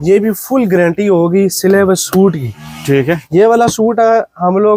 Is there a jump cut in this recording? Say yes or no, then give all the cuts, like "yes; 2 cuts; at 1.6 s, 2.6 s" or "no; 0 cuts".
no; 0 cuts